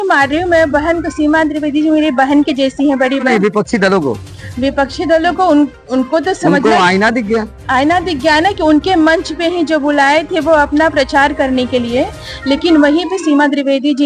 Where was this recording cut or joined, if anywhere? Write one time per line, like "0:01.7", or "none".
0:03.3